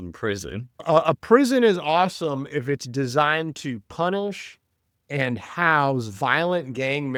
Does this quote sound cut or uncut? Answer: uncut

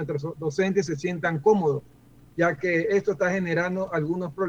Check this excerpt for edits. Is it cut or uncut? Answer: uncut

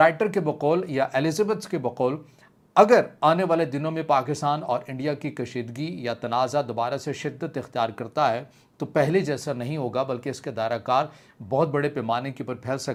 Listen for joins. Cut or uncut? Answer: uncut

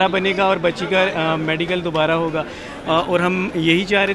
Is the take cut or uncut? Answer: uncut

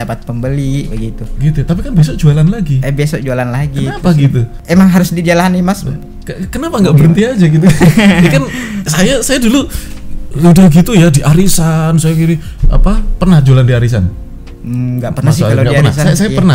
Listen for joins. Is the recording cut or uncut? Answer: uncut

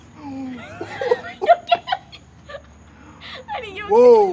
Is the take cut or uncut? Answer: uncut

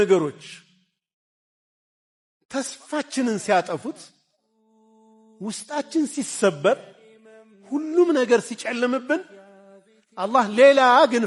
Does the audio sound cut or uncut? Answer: uncut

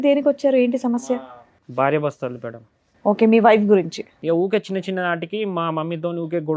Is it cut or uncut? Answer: cut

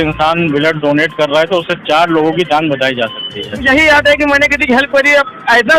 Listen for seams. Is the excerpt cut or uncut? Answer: cut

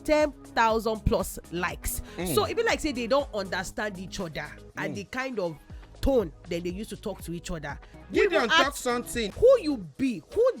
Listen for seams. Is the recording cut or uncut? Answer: cut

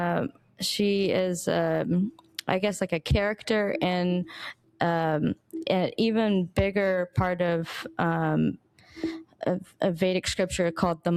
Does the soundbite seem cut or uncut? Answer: uncut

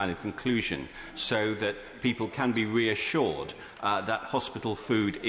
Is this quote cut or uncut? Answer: uncut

